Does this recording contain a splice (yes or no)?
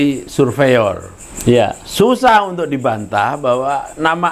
no